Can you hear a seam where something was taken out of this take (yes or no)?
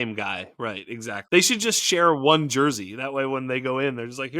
yes